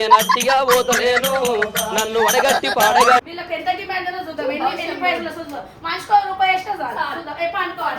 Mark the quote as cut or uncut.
cut